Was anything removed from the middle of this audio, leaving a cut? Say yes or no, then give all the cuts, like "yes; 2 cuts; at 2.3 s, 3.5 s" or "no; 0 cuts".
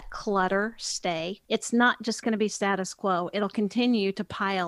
yes; 1 cut; at 1.4 s